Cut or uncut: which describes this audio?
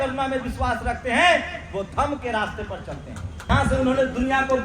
cut